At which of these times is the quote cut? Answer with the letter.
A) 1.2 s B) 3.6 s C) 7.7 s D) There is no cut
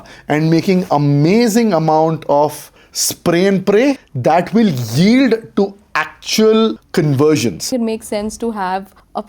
C